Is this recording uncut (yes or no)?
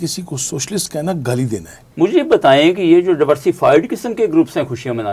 no